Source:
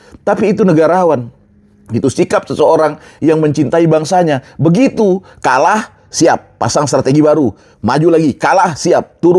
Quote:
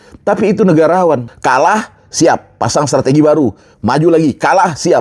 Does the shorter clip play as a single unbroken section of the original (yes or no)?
no